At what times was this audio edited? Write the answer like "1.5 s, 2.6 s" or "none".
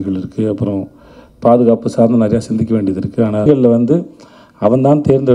3.5 s